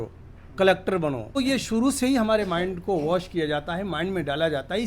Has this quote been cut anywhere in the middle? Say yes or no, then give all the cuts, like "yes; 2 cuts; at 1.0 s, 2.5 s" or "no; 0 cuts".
yes; 1 cut; at 1.4 s